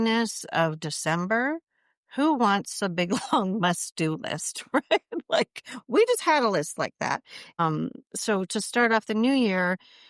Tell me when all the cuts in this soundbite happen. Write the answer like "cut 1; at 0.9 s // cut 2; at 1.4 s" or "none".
cut 1; at 7.6 s

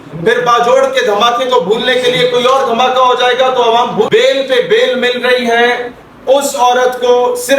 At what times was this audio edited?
cut 1; at 4.1 s

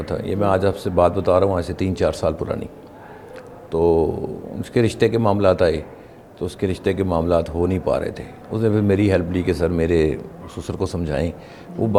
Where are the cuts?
none

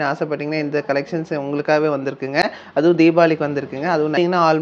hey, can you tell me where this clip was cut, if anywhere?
none

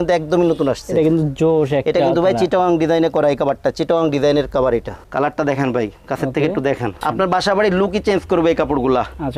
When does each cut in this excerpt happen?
cut 1; at 5.0 s // cut 2; at 7.0 s

